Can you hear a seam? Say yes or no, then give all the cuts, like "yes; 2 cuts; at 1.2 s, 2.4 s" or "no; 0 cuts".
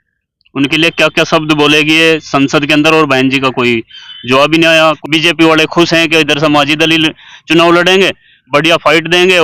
yes; 1 cut; at 5.0 s